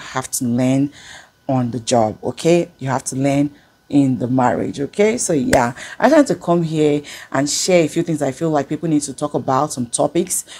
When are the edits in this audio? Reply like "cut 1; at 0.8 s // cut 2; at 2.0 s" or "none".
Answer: none